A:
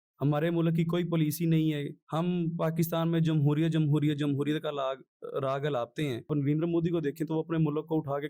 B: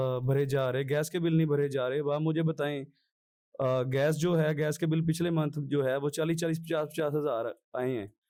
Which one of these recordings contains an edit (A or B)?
A